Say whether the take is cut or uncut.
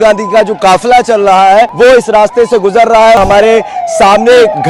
cut